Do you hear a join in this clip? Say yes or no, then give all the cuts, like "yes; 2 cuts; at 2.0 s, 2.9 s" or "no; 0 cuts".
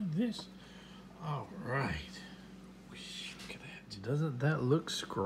yes; 1 cut; at 3.9 s